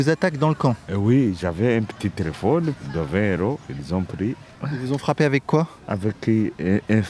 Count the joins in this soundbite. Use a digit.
4